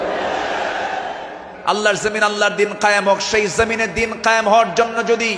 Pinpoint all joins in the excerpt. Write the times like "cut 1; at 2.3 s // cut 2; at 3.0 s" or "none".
cut 1; at 1.5 s